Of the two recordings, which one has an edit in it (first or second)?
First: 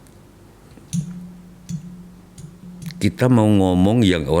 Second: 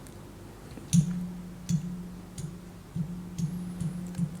first